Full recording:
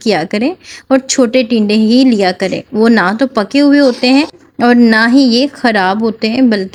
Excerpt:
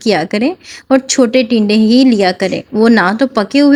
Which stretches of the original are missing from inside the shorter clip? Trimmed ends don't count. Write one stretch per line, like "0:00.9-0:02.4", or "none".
none